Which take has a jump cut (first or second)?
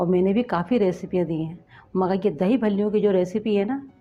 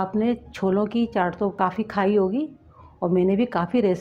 second